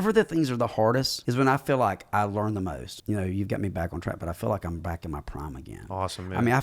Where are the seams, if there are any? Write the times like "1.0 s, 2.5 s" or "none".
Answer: 1.2 s, 2.9 s